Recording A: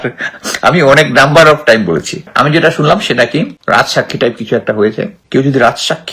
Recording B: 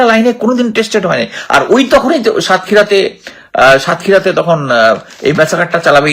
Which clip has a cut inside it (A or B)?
A